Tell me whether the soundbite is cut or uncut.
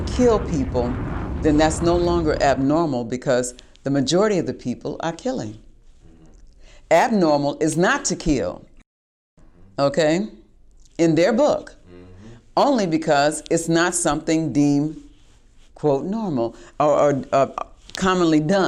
uncut